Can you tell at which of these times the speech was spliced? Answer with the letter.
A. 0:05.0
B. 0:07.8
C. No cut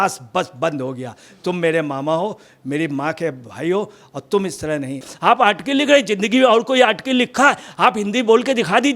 A